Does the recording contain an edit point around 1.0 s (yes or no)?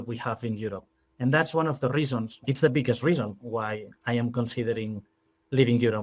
no